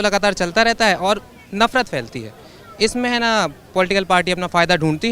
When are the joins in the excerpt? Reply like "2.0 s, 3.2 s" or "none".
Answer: none